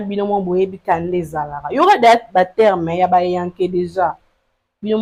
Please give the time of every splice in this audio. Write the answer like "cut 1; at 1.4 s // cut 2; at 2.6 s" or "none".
none